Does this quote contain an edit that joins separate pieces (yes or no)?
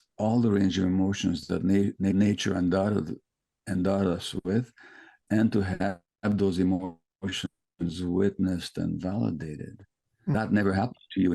yes